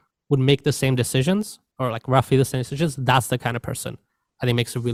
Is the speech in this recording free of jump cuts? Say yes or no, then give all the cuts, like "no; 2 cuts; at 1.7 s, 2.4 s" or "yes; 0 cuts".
yes; 0 cuts